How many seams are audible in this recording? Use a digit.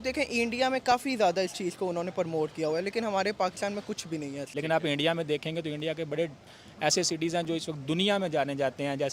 1